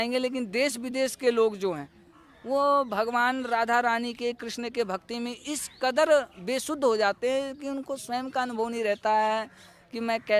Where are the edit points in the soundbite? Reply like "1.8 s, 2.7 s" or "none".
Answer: none